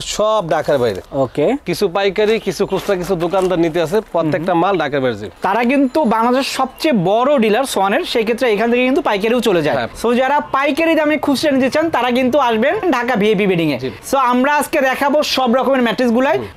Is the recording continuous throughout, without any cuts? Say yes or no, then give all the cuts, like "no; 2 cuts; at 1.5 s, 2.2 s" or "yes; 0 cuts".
yes; 0 cuts